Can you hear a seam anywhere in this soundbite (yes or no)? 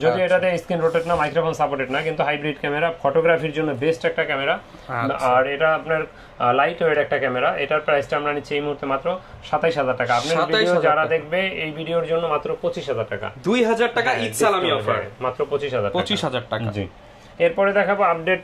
no